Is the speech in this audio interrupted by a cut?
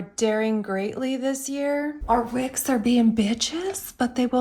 no; 0 cuts

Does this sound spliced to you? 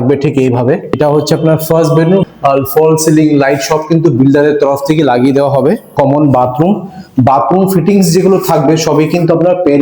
yes; 3 cuts; at 1.0 s, 2.3 s, 5.9 s

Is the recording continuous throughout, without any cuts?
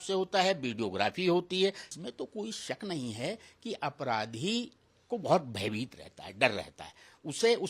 no; 1 cut; at 1.9 s

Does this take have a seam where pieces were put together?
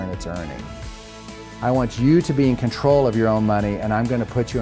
yes; 1 cut; at 1.2 s

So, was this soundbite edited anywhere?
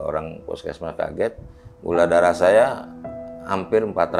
no; 0 cuts

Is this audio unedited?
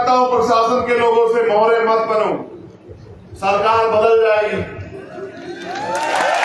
yes; 0 cuts

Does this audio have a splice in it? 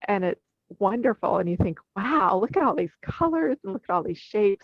no; 0 cuts

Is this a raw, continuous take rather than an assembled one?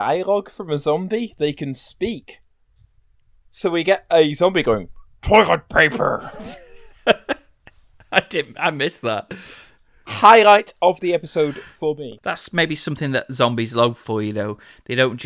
no; 1 cut; at 12.1 s

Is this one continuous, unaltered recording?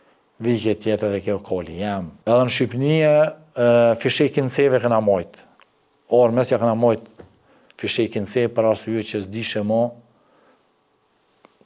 no; 1 cut; at 2.1 s

